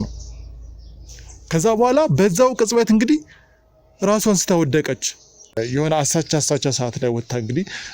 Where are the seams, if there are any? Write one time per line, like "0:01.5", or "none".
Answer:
0:05.5